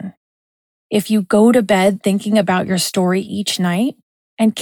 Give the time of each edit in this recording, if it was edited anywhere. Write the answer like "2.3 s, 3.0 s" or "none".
0.9 s